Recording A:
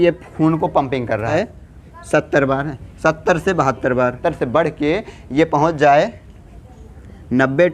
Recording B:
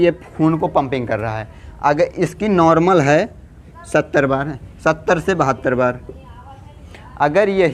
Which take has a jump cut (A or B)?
A